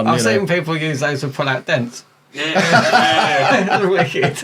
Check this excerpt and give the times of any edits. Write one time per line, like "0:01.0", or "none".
none